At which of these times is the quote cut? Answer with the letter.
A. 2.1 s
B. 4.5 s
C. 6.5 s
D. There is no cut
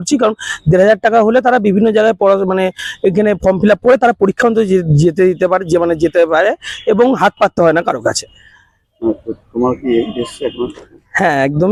D